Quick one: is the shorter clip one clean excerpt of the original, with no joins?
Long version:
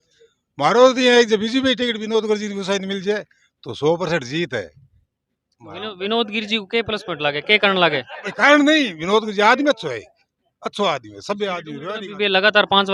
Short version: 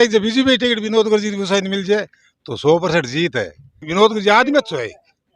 no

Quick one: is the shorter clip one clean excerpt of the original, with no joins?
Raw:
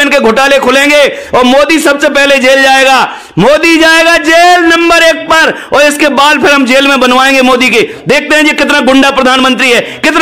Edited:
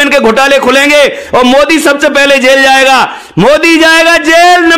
yes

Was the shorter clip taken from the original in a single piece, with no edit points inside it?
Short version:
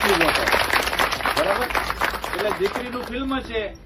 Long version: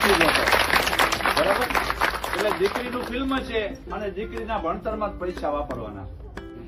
yes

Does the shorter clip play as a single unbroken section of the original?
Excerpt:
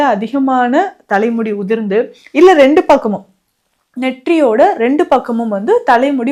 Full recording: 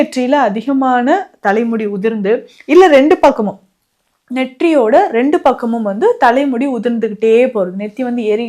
yes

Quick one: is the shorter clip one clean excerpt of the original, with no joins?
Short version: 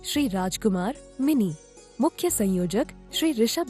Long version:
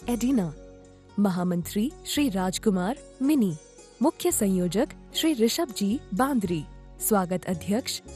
yes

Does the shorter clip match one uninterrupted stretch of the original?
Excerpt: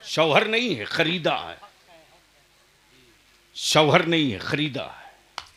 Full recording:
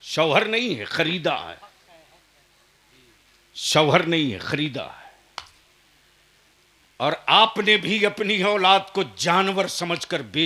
yes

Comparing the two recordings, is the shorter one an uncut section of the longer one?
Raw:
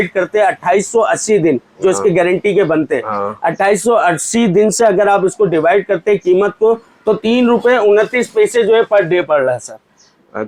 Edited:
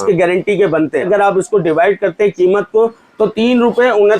no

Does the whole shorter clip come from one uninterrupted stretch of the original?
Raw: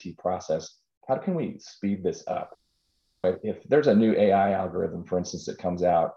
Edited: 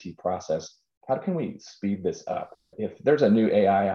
no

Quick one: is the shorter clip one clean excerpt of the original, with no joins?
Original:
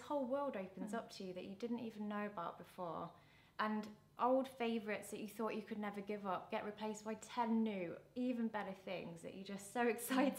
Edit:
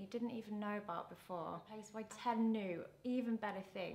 no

